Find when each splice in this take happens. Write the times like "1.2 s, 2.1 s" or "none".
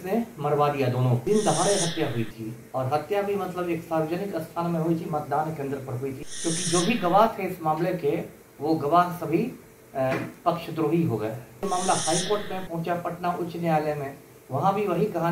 1.2 s, 6.2 s, 11.7 s